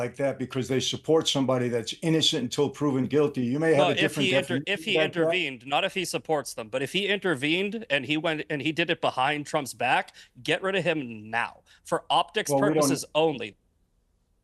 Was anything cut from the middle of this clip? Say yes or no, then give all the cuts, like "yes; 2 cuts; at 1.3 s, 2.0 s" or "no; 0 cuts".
no; 0 cuts